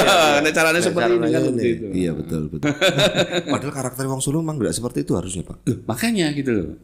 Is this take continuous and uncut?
no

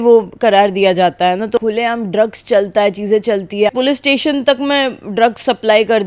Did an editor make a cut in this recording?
yes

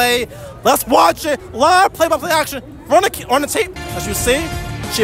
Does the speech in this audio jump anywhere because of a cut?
no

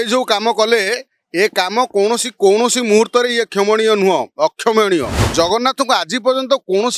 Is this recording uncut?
no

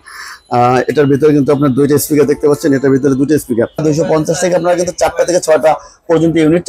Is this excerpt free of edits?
no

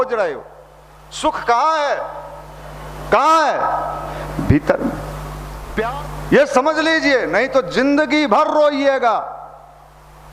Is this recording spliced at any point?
yes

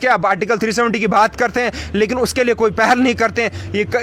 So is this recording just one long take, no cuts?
yes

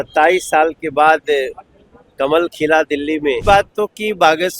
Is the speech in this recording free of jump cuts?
no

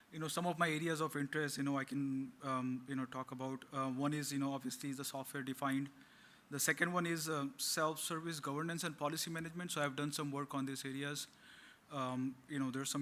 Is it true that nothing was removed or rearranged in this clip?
no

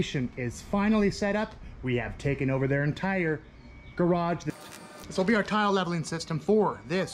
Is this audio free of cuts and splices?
no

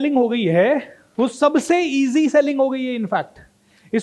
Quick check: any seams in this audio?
yes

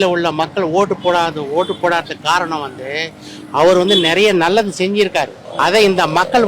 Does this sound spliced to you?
yes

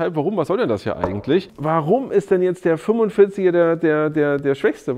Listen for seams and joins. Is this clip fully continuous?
no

